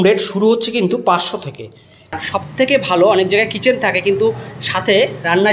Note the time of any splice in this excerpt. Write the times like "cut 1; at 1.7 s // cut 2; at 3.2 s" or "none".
cut 1; at 2.2 s